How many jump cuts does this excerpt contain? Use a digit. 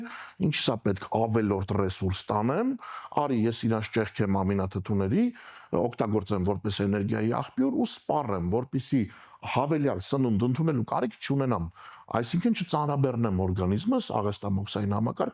0